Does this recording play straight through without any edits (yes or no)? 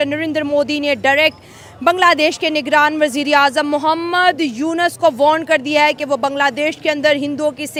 yes